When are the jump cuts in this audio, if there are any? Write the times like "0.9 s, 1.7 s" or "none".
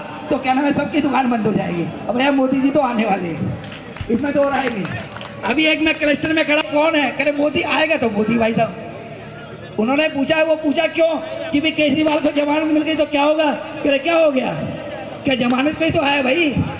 none